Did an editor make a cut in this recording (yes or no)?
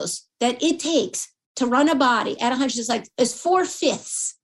yes